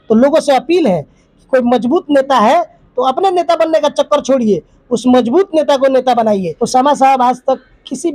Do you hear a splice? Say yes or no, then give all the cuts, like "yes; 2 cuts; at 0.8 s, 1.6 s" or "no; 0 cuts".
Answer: yes; 1 cut; at 6.5 s